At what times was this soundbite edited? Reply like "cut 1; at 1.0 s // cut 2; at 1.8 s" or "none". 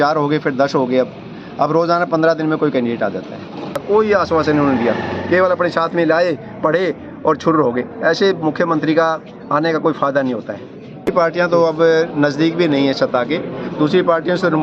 cut 1; at 3.8 s // cut 2; at 11.1 s